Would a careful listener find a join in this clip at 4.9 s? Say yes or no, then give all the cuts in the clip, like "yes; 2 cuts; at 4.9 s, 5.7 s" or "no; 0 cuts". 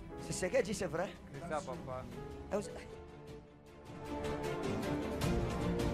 no; 1 cut; at 2.8 s